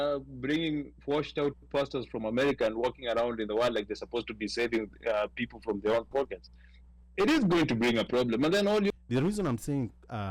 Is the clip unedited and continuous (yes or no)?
no